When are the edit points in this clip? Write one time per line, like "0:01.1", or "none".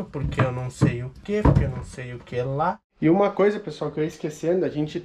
0:03.0